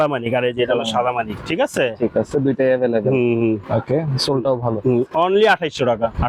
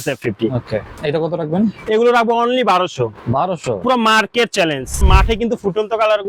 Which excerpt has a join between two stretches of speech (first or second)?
second